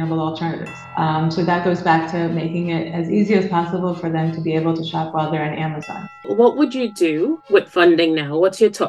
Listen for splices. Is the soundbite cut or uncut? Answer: cut